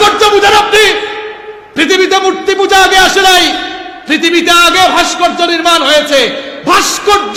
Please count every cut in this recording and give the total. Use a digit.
0